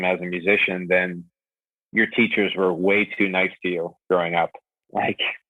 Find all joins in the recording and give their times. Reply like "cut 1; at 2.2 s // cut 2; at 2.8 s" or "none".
none